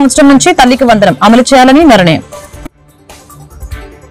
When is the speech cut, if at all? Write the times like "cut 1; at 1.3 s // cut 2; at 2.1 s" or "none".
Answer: cut 1; at 2.3 s